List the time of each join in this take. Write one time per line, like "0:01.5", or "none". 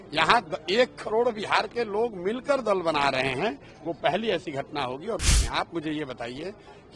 0:05.2